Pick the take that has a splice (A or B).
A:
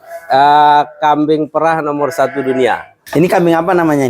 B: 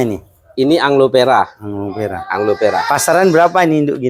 A